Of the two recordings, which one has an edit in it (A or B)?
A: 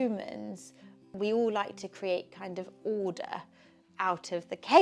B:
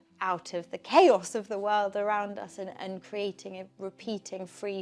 A